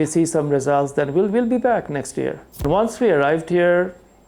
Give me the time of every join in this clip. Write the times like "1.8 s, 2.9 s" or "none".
2.6 s